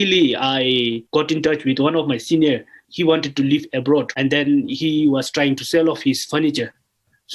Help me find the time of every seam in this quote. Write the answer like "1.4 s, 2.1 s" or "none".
1.0 s, 2.8 s, 4.1 s